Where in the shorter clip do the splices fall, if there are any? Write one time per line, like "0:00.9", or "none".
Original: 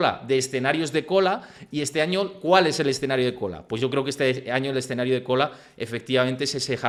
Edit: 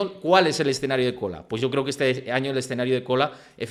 none

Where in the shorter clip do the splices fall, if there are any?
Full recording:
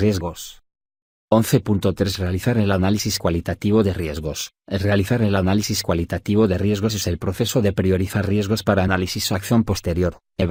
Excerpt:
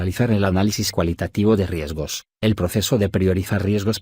0:02.5

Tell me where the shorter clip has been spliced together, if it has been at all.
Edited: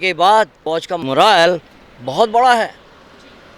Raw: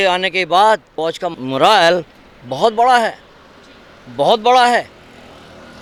0:01.0

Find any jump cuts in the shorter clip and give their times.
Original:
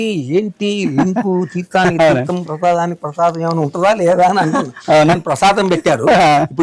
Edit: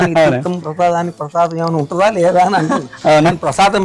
none

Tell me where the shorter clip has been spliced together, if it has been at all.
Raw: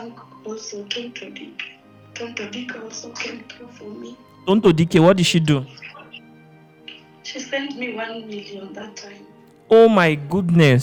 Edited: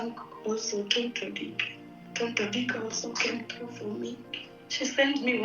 0:04.3

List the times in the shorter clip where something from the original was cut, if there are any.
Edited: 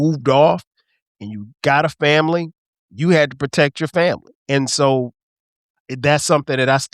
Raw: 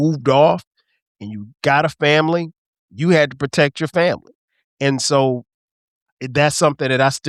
0:04.3

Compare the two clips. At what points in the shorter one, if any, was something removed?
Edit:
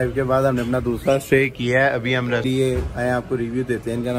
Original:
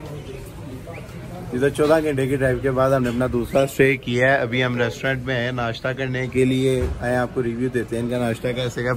0:02.5

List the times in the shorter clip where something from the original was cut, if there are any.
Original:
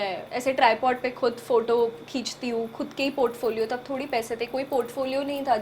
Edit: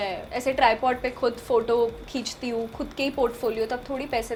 none

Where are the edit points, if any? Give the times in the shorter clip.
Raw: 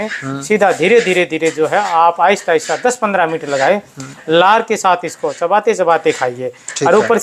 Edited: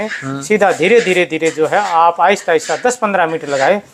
none

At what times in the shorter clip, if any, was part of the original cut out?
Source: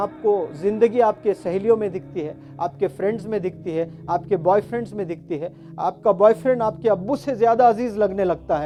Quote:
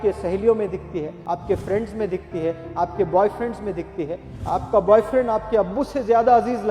0:01.1

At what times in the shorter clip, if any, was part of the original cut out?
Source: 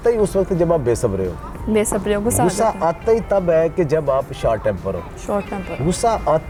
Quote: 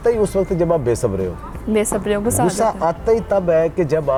none

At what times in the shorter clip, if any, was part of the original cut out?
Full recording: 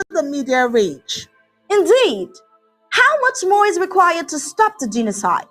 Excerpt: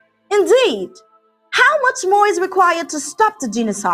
none

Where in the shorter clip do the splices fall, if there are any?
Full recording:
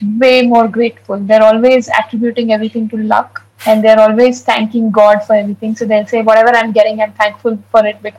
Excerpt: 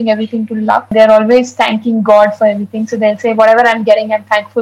0:00.9

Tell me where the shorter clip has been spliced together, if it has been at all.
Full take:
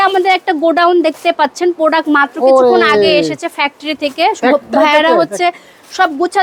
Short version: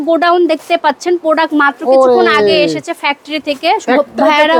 none

